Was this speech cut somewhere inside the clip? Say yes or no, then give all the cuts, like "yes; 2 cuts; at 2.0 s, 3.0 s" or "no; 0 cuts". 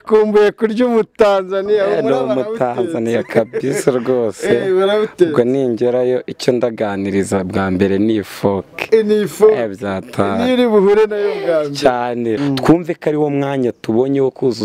yes; 1 cut; at 12.4 s